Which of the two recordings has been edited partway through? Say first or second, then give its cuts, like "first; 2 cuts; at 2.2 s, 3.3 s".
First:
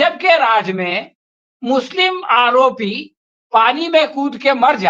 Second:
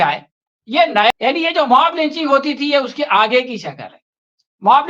second; 1 cut; at 1.1 s